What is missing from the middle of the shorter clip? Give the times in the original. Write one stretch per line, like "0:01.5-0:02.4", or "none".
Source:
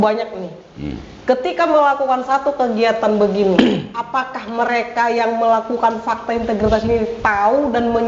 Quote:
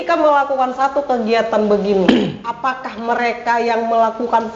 none